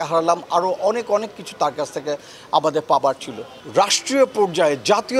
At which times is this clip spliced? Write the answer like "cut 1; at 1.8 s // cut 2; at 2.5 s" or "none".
cut 1; at 3.6 s